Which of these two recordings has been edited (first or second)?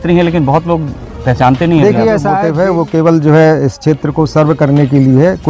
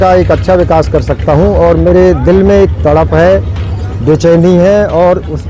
first